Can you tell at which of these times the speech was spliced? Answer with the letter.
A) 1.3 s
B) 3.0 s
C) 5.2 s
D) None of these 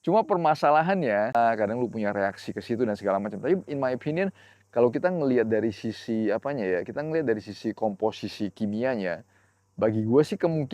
A